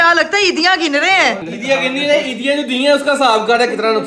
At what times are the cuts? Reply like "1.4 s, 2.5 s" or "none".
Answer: 1.4 s